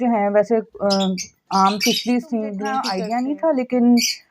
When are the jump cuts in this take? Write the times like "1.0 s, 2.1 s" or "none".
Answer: 2.9 s

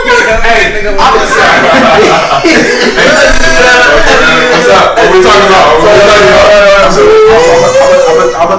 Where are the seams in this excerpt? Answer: 1.4 s

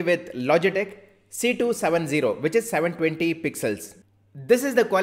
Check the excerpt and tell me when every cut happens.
4.0 s

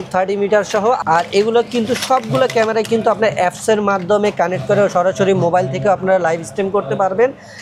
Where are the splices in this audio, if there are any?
1.0 s

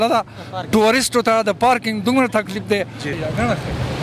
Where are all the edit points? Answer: 3.1 s

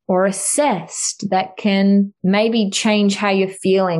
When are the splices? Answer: 2.1 s

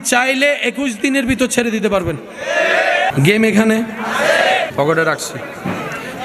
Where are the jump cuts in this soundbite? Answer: 3.1 s, 4.7 s

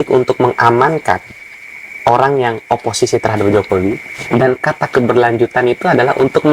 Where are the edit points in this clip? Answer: none

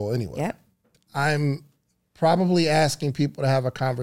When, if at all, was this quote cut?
0.9 s

